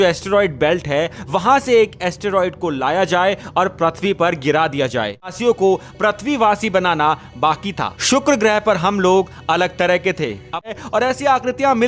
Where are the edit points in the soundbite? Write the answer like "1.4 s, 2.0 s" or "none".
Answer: 5.4 s, 10.7 s